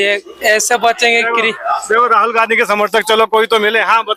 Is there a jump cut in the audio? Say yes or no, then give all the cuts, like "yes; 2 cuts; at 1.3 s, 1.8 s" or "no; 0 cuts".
no; 0 cuts